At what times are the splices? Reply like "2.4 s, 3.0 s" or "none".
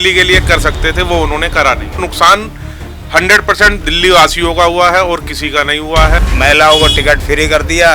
2.0 s, 6.2 s